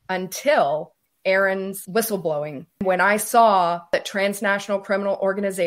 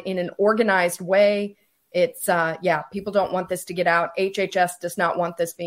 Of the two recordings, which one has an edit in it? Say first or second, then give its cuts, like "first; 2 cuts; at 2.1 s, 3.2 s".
first; 4 cuts; at 1.0 s, 1.8 s, 2.8 s, 3.9 s